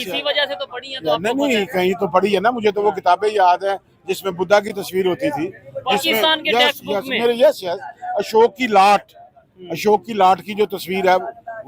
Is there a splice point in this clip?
no; 0 cuts

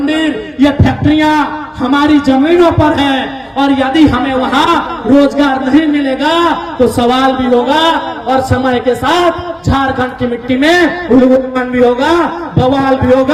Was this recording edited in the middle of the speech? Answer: no; 0 cuts

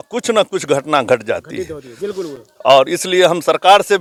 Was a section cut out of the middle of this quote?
no; 0 cuts

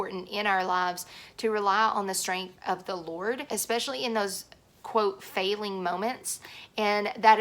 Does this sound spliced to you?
yes; 1 cut; at 3.4 s

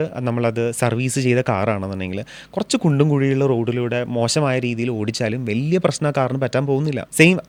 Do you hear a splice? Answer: no; 0 cuts

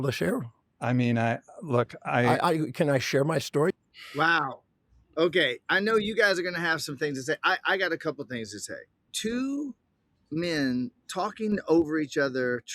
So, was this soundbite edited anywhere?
yes; 2 cuts; at 4.0 s, 9.1 s

